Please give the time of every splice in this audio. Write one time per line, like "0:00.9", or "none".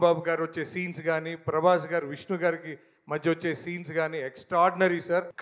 none